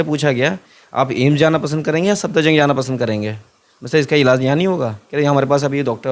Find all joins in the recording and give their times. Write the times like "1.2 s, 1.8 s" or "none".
none